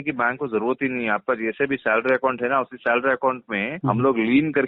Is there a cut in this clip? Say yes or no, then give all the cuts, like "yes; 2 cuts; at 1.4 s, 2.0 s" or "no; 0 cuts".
yes; 1 cut; at 3.7 s